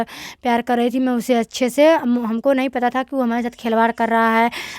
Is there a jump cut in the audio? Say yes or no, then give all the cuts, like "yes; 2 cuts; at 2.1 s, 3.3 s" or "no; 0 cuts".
no; 0 cuts